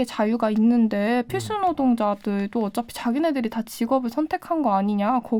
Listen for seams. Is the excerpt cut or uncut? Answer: uncut